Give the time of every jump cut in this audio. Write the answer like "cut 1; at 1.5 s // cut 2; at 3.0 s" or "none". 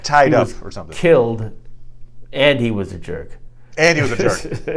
none